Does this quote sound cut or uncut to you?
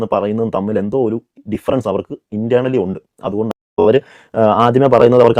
cut